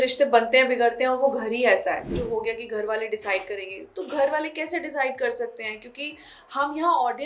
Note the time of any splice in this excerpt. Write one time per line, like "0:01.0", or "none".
0:02.1